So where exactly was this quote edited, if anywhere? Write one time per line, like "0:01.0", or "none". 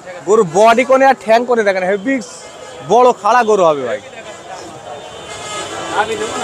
none